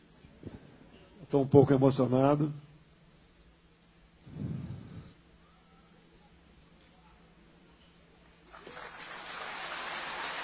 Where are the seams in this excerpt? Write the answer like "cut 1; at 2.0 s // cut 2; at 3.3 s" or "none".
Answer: none